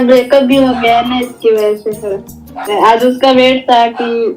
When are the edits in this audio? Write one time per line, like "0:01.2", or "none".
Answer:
0:02.6